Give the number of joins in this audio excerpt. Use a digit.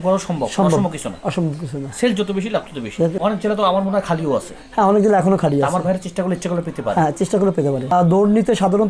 2